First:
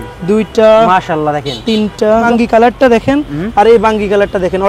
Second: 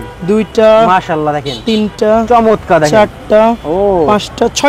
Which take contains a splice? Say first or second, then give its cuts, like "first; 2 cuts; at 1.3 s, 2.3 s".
first; 1 cut; at 2.2 s